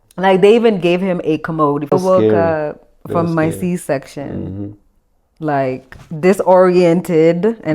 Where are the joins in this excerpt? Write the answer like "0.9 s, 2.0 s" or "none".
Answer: 1.9 s